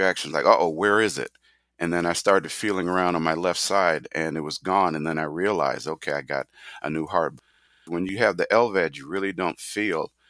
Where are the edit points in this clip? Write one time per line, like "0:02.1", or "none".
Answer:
0:07.5